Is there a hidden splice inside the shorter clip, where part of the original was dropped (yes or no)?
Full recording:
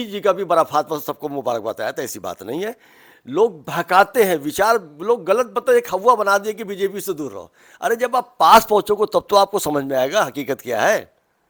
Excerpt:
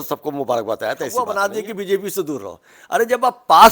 yes